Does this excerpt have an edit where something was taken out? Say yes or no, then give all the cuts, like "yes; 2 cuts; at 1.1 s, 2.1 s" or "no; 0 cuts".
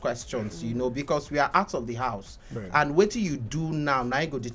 no; 0 cuts